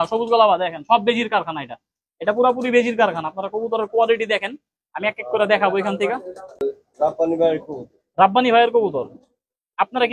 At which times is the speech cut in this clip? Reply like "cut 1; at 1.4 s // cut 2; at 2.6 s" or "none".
cut 1; at 6.5 s